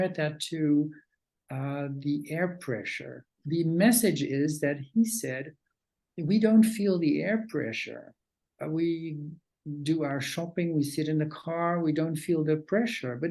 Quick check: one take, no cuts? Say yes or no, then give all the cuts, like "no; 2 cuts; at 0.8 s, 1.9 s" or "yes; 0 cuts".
no; 1 cut; at 3.4 s